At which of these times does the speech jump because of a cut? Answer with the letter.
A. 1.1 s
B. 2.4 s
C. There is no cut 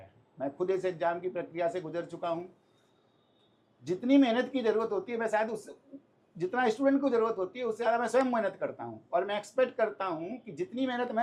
C